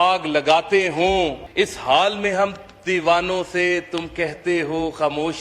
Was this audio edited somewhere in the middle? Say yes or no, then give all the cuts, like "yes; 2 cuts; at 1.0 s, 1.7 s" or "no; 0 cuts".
yes; 1 cut; at 1.4 s